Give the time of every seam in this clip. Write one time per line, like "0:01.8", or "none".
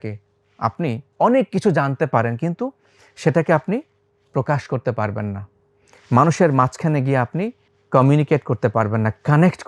none